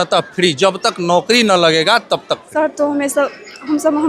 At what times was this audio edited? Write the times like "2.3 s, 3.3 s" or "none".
2.4 s